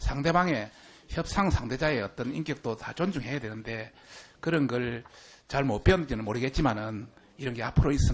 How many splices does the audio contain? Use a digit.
0